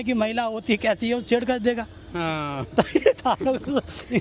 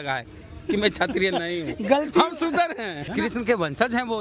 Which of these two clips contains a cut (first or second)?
second